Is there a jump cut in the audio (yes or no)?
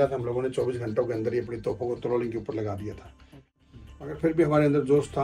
yes